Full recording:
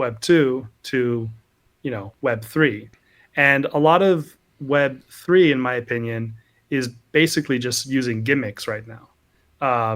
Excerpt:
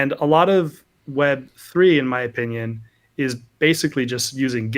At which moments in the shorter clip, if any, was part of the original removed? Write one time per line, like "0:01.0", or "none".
none